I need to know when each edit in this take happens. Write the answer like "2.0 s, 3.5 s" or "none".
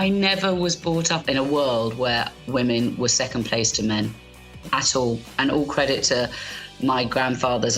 1.2 s